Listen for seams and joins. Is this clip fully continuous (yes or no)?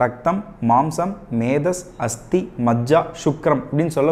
yes